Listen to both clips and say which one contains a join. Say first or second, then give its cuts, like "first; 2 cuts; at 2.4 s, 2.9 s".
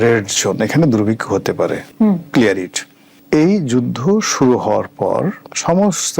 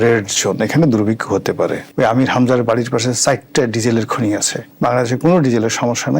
second; 2 cuts; at 1.9 s, 4.6 s